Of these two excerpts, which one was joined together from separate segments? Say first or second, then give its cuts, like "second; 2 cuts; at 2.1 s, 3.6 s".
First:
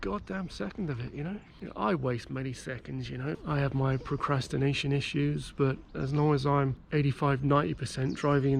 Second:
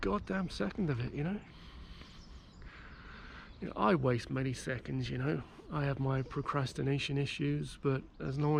first; 3 cuts; at 1.5 s, 3.4 s, 6.8 s